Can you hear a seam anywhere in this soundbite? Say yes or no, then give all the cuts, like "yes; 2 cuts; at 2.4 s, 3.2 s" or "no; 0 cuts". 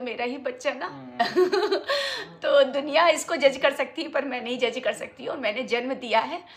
no; 0 cuts